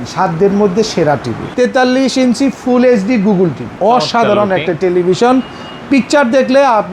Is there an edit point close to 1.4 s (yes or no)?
yes